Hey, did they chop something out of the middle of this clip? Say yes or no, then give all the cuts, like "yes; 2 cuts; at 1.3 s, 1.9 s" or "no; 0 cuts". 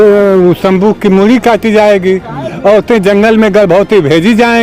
no; 0 cuts